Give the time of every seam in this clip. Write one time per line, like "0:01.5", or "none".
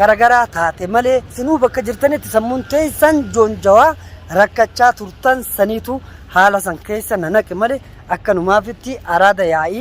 0:01.3